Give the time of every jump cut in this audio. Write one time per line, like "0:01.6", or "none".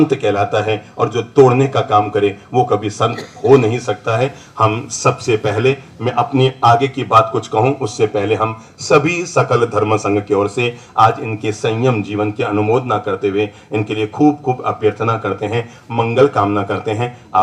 none